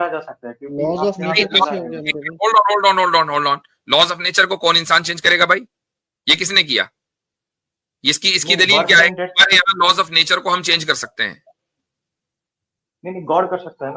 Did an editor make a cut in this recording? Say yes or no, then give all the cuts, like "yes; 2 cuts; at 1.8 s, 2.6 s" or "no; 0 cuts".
no; 0 cuts